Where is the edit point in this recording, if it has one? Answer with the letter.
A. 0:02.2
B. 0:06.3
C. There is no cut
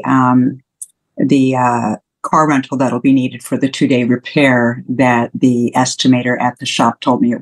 C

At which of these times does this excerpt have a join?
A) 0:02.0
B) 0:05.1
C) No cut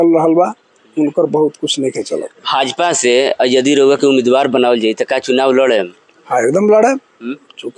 C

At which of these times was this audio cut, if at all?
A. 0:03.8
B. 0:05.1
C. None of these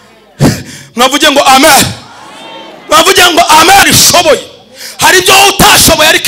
A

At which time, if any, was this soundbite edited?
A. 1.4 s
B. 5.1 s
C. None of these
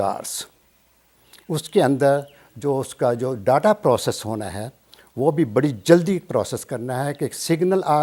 C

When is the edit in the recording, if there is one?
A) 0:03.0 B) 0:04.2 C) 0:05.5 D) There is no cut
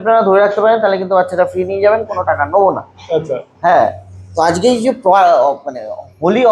D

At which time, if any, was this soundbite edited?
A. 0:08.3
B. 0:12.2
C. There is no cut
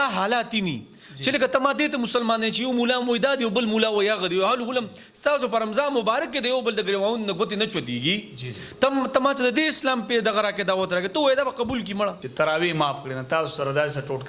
B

